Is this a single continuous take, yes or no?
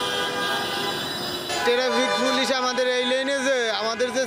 no